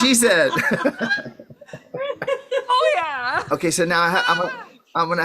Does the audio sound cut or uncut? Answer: cut